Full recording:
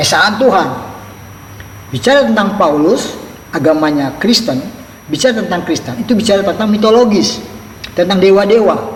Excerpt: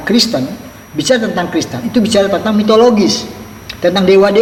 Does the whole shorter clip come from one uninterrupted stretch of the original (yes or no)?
yes